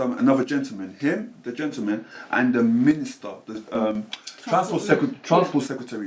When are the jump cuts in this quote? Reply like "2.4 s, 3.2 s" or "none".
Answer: none